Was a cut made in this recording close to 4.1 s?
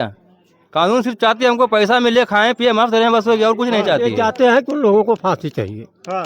yes; 1 cut; at 4.1 s

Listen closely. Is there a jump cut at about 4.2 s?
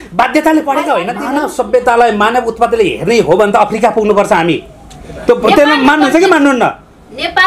no; 1 cut; at 1.2 s

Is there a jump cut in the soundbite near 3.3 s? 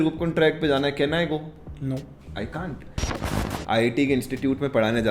yes; 1 cut; at 3.3 s

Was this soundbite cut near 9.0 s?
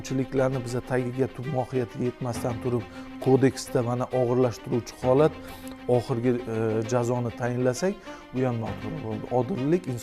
no; 0 cuts

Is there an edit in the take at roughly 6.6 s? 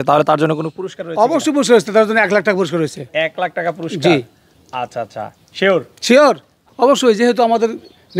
yes; 1 cut; at 6.6 s

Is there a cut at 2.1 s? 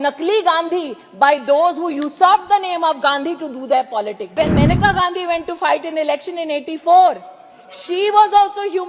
no; 1 cut; at 4.3 s

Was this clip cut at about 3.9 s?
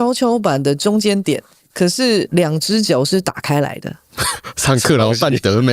no; 1 cut; at 2.3 s

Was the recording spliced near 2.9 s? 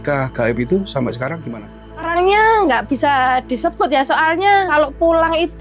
no; 2 cuts; at 1.4 s, 4.7 s

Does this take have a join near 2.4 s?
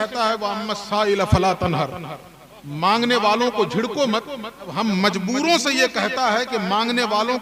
no; 1 cut; at 4.6 s

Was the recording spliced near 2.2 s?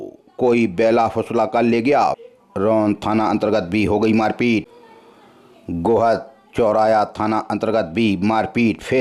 yes; 2 cuts; at 2.2 s, 4.7 s

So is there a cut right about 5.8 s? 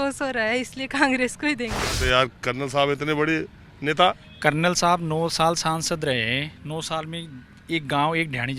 no; 1 cut; at 1.9 s

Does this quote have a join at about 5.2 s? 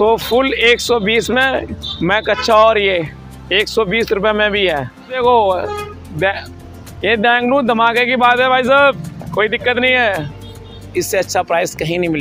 yes; 2 cuts; at 5.2 s, 10.7 s

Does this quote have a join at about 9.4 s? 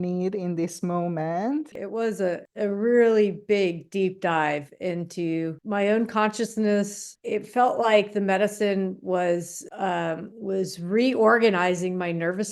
no; 3 cuts; at 1.8 s, 5.6 s, 7.1 s

